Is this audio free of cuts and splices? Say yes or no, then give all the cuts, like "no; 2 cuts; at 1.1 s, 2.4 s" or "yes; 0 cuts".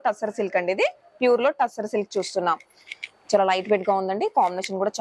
yes; 0 cuts